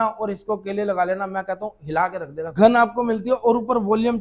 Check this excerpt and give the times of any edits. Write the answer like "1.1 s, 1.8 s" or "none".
2.5 s